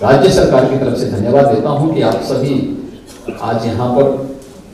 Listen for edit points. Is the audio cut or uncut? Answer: uncut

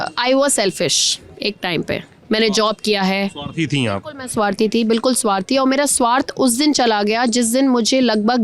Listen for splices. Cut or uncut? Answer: uncut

